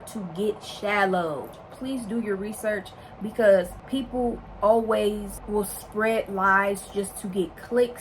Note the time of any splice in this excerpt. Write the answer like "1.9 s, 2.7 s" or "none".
1.6 s, 3.8 s